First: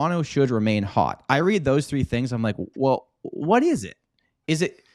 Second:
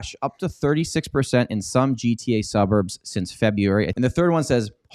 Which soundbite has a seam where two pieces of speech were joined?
second; 1 cut; at 3.9 s

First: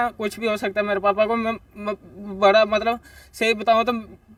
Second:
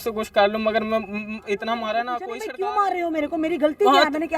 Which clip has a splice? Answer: second; 1 cut; at 2.4 s

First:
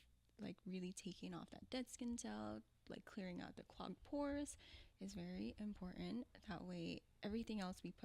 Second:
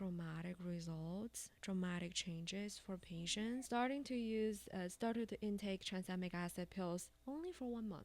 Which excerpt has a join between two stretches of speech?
second; 1 cut; at 3.7 s

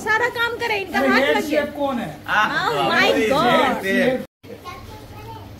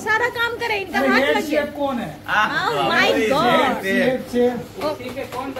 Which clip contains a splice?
first; 1 cut; at 4.3 s

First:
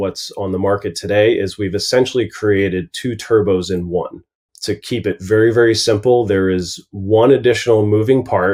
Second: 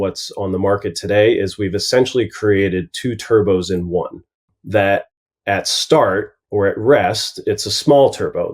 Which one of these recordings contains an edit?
second; 1 cut; at 4.5 s

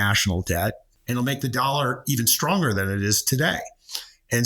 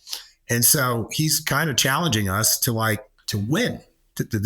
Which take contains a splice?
first; 1 cut; at 0.9 s

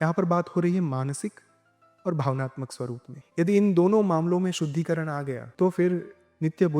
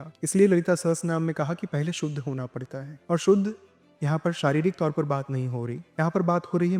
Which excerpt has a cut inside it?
first; 2 cuts; at 3.1 s, 5.4 s

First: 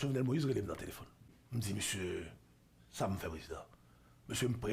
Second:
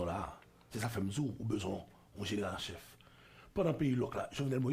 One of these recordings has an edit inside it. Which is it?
first; 1 cut; at 1.4 s

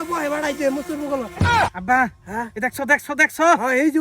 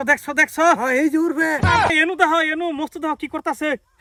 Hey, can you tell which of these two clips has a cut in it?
first; 1 cut; at 1.7 s

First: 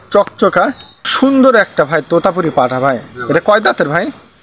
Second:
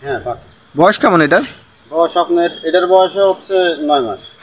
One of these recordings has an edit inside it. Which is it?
first; 1 cut; at 1.1 s

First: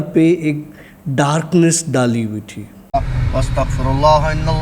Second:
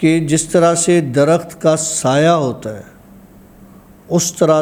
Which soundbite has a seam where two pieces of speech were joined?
first; 1 cut; at 2.8 s

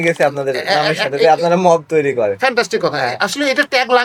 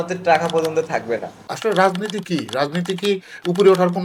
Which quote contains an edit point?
second; 1 cut; at 1.5 s

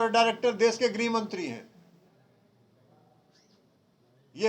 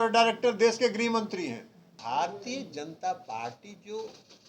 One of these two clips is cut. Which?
second; 1 cut; at 2.0 s

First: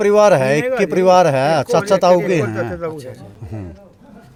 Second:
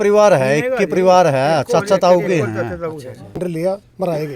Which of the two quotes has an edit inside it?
second; 1 cut; at 3.4 s

